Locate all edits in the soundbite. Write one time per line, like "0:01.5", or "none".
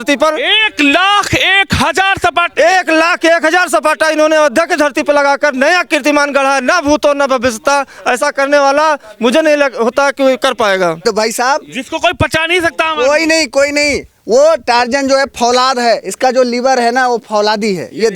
0:11.0

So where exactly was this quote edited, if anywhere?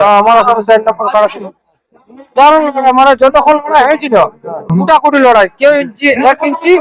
none

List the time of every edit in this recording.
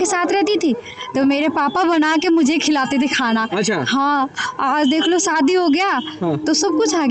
none

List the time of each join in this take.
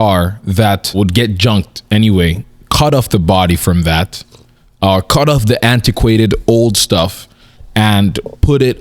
0:01.0

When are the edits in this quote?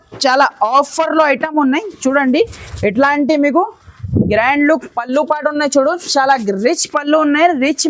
none

